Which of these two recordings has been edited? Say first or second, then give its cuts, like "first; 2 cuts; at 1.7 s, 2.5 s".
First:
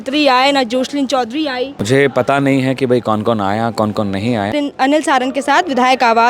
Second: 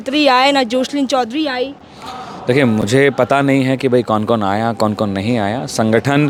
first; 2 cuts; at 1.8 s, 4.5 s